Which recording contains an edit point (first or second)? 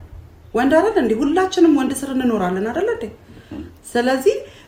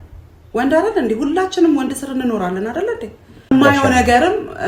second